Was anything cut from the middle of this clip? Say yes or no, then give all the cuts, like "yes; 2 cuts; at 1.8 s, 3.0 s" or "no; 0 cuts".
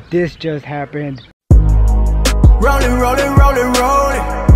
yes; 1 cut; at 1.3 s